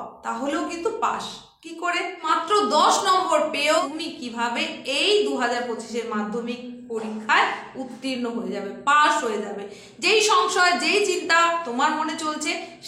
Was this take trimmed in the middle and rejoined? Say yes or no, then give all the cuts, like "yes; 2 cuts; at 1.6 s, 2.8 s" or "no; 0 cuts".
yes; 2 cuts; at 2.3 s, 3.8 s